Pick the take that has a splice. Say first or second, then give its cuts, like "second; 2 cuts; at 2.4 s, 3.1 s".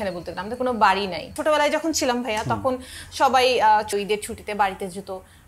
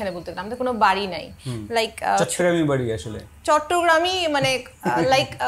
first; 2 cuts; at 1.3 s, 3.9 s